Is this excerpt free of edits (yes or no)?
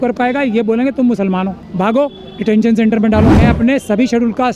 no